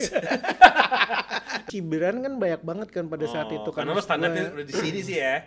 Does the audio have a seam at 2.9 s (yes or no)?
no